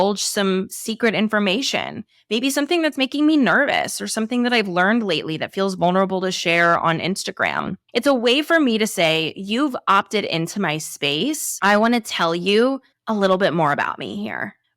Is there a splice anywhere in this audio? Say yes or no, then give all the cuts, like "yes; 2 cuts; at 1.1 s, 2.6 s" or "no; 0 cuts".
yes; 1 cut; at 11.5 s